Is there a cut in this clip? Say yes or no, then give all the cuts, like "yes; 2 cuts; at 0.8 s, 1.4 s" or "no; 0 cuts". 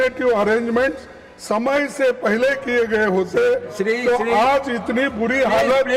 no; 0 cuts